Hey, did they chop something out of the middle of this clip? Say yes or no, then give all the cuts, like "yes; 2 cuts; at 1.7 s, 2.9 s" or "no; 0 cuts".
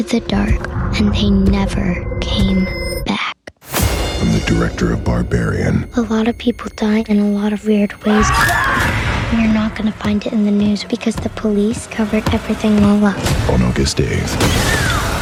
no; 0 cuts